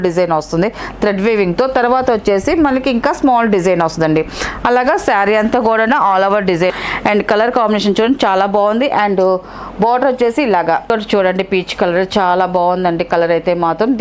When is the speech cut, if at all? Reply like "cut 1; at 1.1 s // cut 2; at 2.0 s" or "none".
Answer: cut 1; at 6.7 s // cut 2; at 10.9 s